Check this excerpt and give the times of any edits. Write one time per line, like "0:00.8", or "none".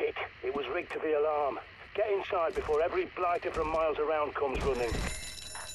none